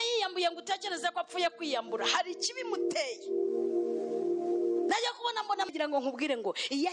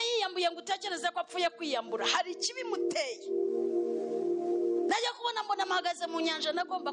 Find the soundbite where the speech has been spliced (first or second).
first